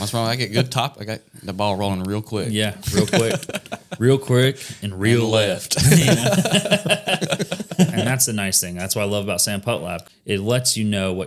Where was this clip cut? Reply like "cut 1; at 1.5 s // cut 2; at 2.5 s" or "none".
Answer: cut 1; at 8.0 s // cut 2; at 10.1 s